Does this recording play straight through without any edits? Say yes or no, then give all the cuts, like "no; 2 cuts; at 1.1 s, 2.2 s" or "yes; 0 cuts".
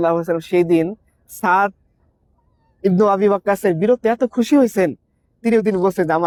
yes; 0 cuts